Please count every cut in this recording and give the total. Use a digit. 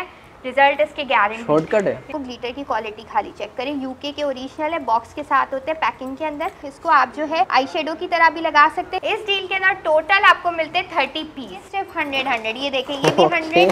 5